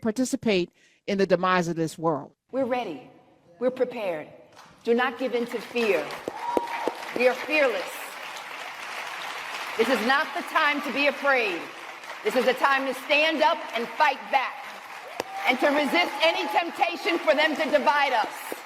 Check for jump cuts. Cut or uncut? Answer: cut